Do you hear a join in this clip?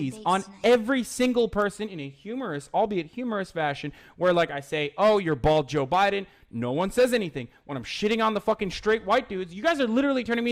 no; 0 cuts

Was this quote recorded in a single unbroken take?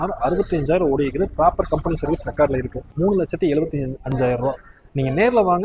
no; 1 cut; at 2.8 s

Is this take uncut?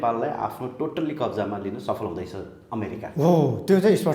yes; 0 cuts

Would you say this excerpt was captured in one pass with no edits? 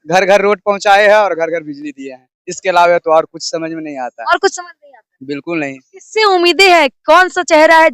yes; 0 cuts

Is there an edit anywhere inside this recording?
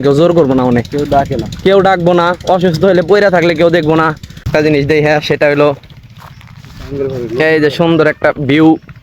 yes; 1 cut; at 4.5 s

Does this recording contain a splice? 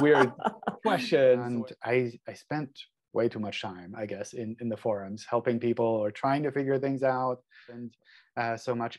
yes; 2 cuts; at 1.5 s, 7.9 s

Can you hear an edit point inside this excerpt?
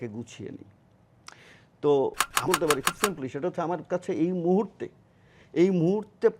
yes; 1 cut; at 2.5 s

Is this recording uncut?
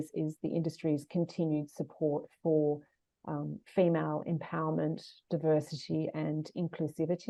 yes; 0 cuts

